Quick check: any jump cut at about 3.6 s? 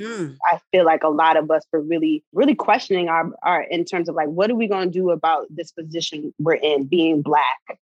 no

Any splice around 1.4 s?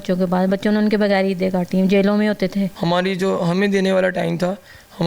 no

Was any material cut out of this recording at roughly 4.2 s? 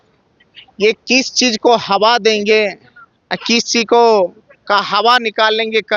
no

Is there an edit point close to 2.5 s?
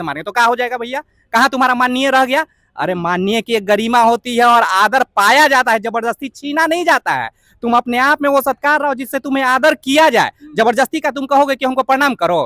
no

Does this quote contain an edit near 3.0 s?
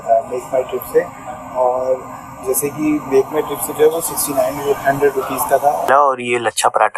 no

